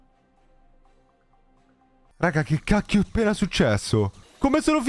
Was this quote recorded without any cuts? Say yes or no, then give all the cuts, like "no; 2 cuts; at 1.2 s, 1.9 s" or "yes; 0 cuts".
yes; 0 cuts